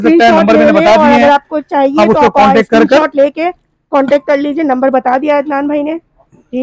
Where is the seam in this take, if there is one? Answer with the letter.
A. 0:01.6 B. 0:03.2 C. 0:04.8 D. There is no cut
D